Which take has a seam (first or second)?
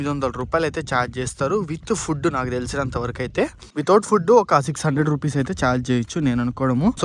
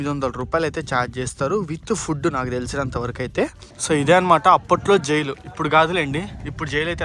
second